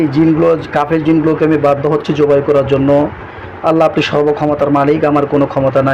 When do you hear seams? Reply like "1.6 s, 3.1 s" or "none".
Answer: none